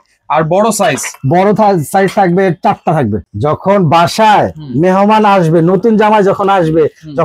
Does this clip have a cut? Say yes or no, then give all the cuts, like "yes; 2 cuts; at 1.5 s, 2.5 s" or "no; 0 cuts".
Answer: yes; 1 cut; at 3.2 s